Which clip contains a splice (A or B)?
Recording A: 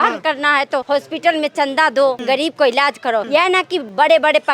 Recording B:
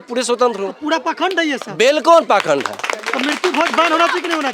A